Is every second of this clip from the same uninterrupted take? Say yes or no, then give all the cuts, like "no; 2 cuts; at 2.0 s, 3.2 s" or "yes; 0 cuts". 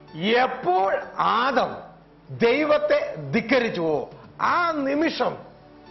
yes; 0 cuts